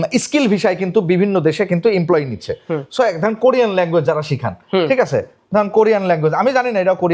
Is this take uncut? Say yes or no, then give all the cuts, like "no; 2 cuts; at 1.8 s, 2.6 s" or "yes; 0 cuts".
yes; 0 cuts